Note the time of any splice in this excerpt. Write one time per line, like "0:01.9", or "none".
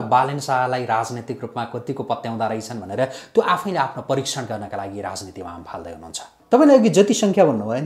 0:06.3